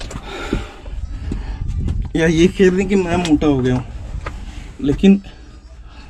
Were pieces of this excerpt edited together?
no; 0 cuts

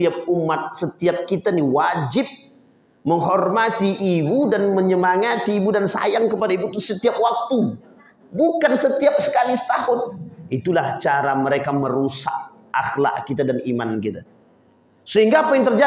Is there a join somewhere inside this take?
no; 0 cuts

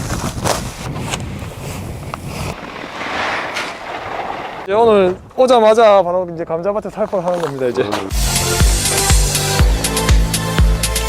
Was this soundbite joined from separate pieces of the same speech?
yes; 4 cuts; at 0.9 s, 2.5 s, 4.6 s, 8.2 s

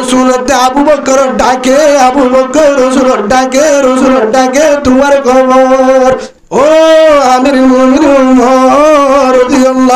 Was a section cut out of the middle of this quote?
yes; 1 cut; at 6.3 s

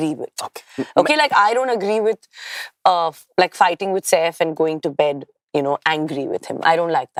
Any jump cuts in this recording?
no; 0 cuts

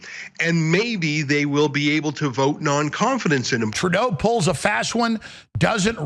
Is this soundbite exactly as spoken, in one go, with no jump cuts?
no; 1 cut; at 3.7 s

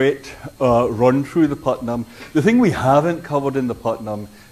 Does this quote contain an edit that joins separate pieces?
yes; 1 cut; at 2.9 s

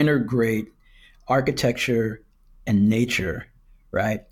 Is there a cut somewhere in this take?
no; 0 cuts

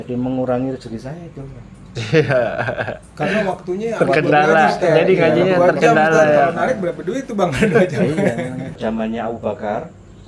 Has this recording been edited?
yes; 1 cut; at 8.8 s

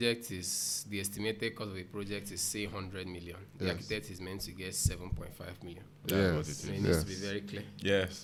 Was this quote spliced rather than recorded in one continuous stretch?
no; 0 cuts

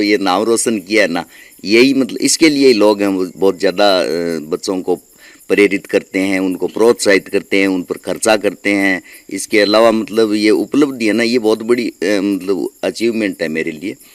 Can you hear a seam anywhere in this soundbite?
no; 0 cuts

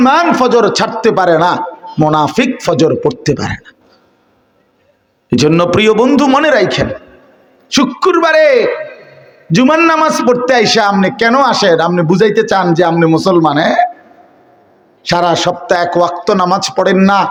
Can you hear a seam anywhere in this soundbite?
no; 0 cuts

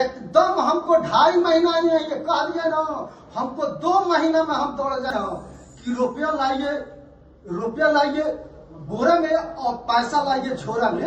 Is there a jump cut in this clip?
yes; 1 cut; at 5.1 s

